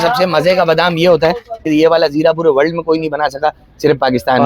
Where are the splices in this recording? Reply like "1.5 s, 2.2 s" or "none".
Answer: 1.6 s